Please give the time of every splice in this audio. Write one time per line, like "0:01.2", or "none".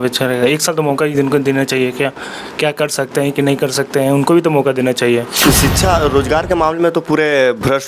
0:05.3